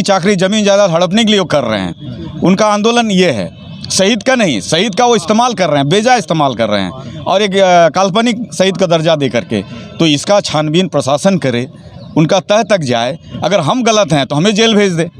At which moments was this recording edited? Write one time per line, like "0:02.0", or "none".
none

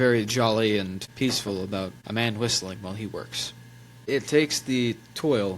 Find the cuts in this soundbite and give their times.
0:01.0
0:02.0
0:04.1

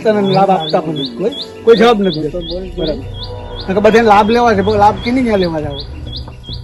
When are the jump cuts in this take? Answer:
none

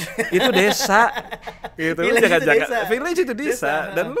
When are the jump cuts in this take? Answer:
none

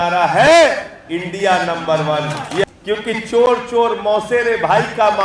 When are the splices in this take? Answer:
0:02.6

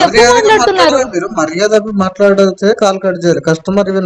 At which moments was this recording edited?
none

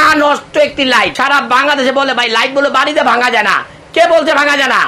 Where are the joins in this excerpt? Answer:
0:01.1

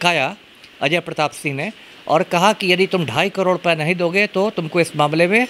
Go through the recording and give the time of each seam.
none

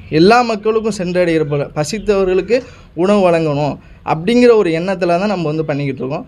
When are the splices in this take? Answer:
none

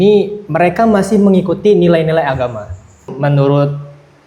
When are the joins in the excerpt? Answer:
0:03.1

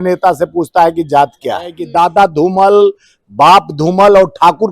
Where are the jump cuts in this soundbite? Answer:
0:01.8

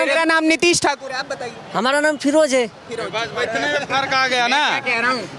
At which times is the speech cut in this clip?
none

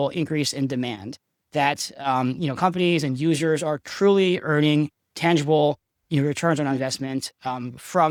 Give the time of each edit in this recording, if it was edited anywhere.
none

